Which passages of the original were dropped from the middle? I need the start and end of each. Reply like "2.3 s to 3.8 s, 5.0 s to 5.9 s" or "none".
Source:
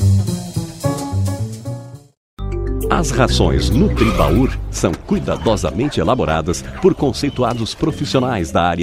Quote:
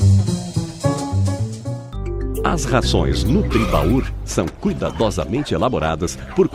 1.9 s to 2.3 s